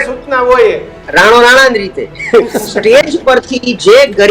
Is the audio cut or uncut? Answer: cut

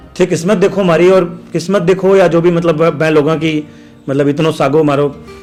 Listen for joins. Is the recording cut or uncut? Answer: uncut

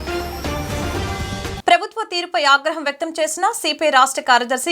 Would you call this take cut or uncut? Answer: cut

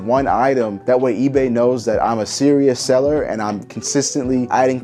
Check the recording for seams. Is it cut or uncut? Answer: uncut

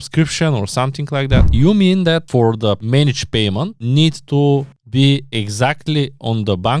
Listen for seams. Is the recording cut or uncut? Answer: cut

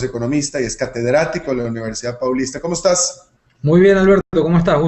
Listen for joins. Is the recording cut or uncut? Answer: cut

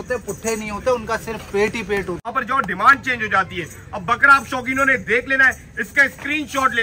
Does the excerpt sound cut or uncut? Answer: cut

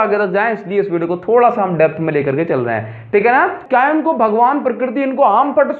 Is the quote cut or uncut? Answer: cut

